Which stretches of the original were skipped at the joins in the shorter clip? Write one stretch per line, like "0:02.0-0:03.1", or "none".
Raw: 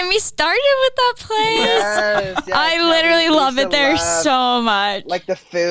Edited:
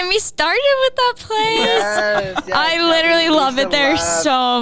none